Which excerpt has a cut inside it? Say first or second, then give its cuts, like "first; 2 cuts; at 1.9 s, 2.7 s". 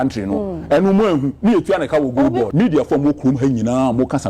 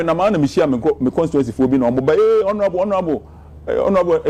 first; 1 cut; at 2.5 s